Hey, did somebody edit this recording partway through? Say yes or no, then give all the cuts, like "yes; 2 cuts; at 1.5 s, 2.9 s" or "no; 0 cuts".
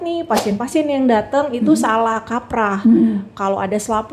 no; 0 cuts